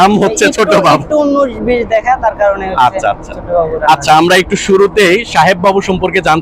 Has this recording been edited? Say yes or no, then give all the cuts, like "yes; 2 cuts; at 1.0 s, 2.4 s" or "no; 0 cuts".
no; 0 cuts